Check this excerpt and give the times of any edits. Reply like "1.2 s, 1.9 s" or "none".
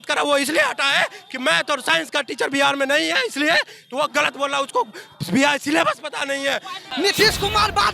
6.9 s